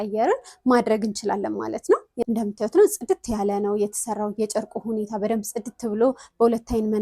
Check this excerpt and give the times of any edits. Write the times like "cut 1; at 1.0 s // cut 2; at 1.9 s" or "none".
cut 1; at 2.1 s